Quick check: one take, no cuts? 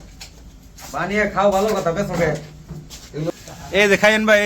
no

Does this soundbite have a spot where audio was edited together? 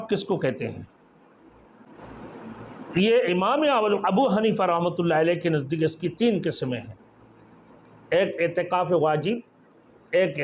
yes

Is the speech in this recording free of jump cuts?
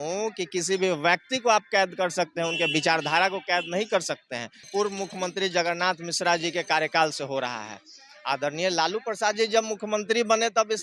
no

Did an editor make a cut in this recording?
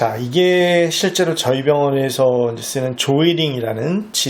no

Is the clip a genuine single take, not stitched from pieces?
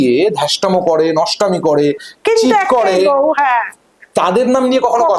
yes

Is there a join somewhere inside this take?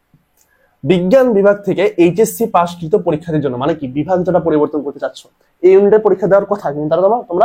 no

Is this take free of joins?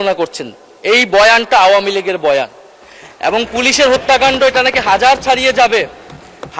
yes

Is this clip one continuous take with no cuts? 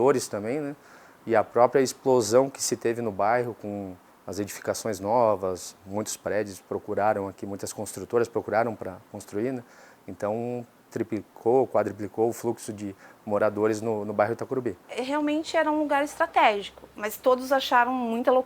no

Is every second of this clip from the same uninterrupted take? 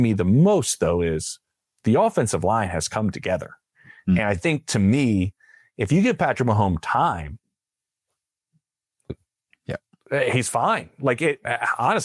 yes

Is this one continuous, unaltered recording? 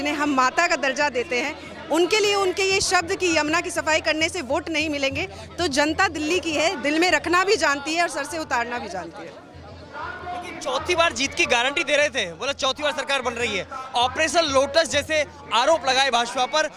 yes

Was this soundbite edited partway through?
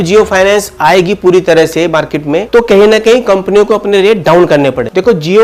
no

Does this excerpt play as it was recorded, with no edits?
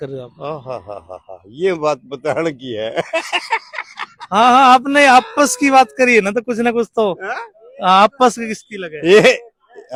yes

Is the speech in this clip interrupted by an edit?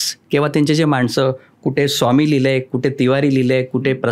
no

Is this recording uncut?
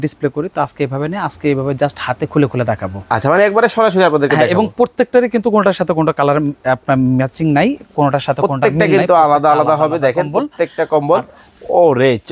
yes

